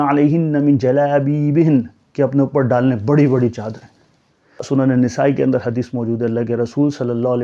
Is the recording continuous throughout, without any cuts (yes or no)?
no